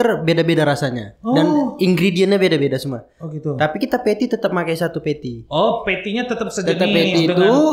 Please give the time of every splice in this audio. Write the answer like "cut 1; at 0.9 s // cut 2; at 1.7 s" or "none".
none